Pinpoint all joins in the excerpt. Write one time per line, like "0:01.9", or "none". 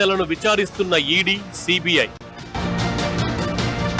none